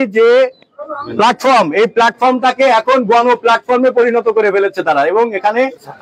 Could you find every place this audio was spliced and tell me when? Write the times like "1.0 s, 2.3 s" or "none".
none